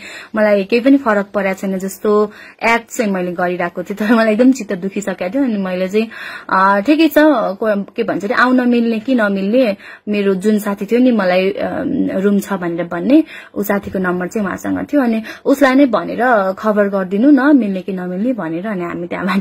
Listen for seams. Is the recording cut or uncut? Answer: uncut